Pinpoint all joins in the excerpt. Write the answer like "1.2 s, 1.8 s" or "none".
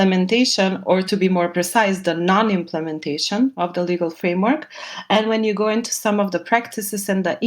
1.0 s